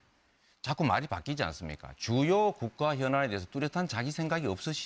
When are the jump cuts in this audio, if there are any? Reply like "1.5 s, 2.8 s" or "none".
3.7 s